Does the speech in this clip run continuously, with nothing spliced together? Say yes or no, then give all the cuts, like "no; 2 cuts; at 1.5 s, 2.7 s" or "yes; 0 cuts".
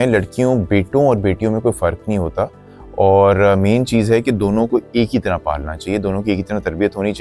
yes; 0 cuts